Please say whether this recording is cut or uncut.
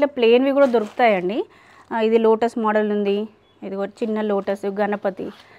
uncut